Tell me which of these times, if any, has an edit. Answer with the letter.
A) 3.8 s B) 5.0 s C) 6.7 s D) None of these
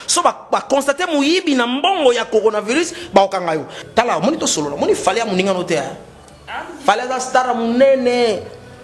A